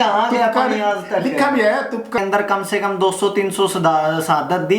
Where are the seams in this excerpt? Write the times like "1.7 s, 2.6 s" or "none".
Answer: 2.2 s